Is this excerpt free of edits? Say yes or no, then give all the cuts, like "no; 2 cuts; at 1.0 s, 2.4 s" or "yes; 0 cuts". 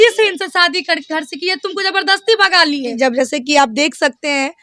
no; 1 cut; at 2.9 s